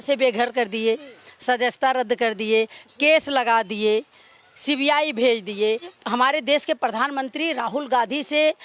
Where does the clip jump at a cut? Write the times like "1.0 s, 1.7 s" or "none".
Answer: 5.9 s